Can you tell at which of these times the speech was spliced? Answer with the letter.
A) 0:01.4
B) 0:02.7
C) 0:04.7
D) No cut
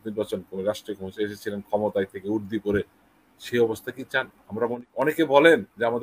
C